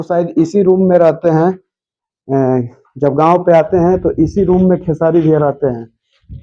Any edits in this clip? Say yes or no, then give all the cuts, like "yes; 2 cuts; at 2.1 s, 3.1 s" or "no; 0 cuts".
no; 0 cuts